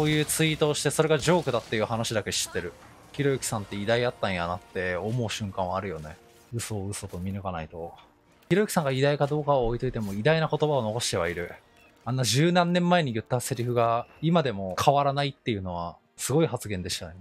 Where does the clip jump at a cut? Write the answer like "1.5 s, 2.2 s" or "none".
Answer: none